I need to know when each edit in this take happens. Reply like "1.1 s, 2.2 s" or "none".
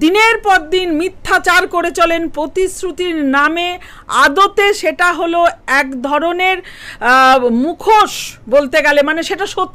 none